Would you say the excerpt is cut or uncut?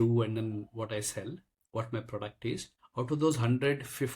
cut